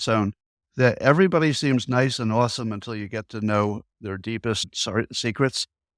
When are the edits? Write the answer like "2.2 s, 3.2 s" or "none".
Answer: 4.7 s